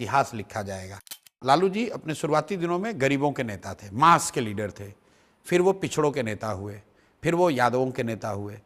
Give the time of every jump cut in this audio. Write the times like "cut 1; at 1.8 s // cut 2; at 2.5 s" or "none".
cut 1; at 1.1 s

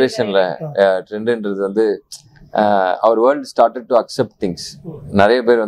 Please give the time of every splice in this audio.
none

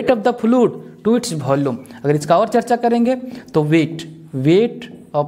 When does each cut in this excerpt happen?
none

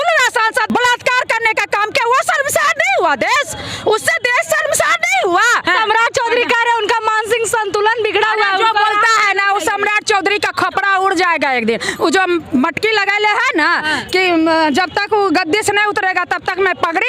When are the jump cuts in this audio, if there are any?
cut 1; at 0.7 s // cut 2; at 5.7 s

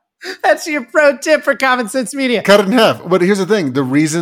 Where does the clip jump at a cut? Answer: cut 1; at 2.4 s

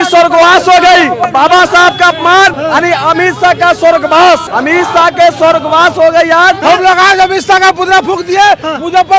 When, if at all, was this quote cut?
cut 1; at 1.2 s // cut 2; at 2.6 s // cut 3; at 4.5 s // cut 4; at 6.6 s

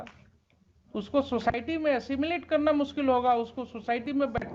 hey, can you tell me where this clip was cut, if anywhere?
none

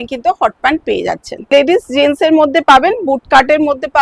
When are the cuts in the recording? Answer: cut 1; at 1.5 s

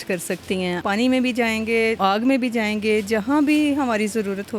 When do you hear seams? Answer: cut 1; at 0.8 s // cut 2; at 2.0 s

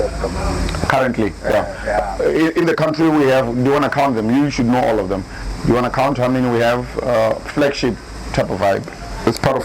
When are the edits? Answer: none

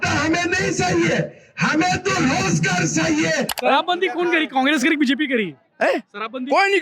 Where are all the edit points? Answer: cut 1; at 3.5 s

